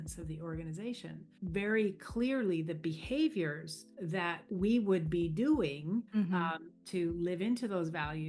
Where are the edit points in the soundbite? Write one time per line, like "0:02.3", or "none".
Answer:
0:01.3
0:04.2
0:06.1